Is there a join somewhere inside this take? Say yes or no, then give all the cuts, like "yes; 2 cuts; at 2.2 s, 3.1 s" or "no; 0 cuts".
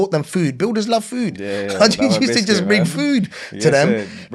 no; 0 cuts